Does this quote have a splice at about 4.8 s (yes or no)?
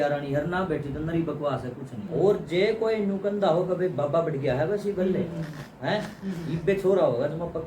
no